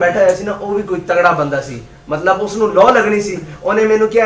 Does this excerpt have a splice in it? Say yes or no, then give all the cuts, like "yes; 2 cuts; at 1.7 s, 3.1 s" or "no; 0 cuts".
no; 0 cuts